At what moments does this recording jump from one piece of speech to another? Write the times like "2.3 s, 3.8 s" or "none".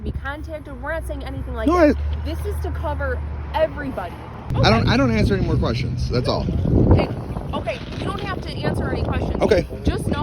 4.4 s

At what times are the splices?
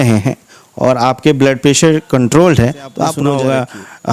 3.2 s

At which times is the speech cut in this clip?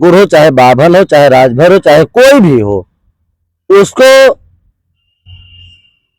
none

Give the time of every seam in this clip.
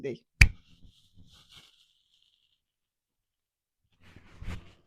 none

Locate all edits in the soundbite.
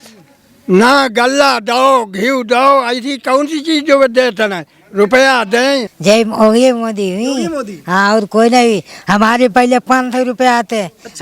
5.9 s

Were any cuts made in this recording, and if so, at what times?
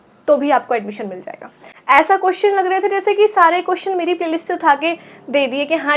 1.7 s

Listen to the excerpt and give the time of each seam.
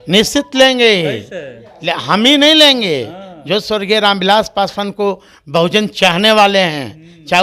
none

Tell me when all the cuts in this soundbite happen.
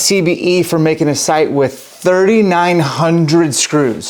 none

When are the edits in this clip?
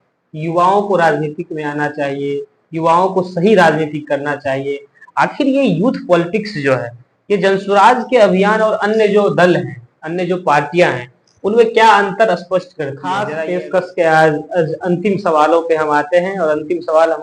13.1 s

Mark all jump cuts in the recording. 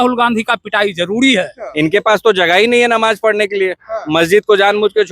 1.6 s

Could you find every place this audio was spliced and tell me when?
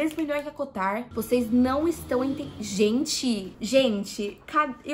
1.1 s, 3.6 s

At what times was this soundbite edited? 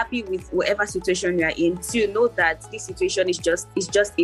none

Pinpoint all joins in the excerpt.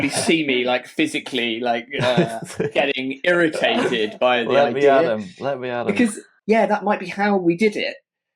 6.3 s

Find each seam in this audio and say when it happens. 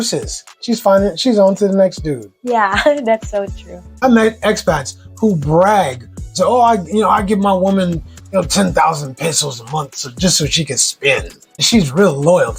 4.0 s, 11.6 s

